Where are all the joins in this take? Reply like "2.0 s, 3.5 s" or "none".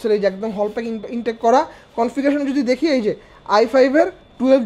none